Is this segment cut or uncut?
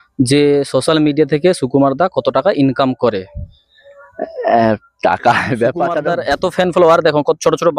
cut